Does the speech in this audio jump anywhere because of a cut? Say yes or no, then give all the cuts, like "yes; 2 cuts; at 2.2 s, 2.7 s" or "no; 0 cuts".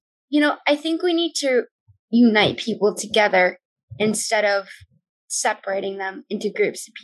no; 0 cuts